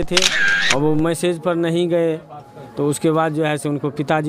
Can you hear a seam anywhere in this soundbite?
no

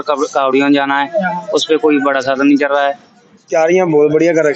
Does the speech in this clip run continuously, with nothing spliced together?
no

